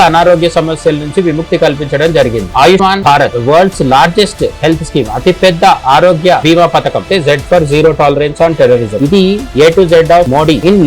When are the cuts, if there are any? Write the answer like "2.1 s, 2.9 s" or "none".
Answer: 2.5 s, 7.0 s